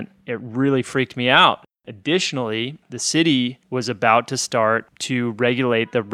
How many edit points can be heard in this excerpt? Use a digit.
2